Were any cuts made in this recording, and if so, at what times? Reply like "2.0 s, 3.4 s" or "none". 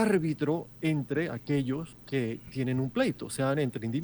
1.9 s